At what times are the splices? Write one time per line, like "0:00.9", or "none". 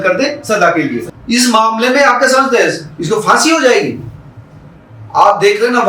0:01.1